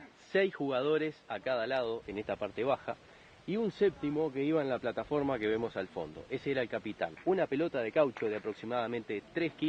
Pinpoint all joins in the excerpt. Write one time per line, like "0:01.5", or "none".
0:07.2